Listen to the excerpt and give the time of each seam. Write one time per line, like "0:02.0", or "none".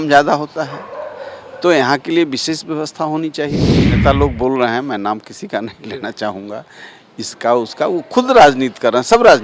0:03.8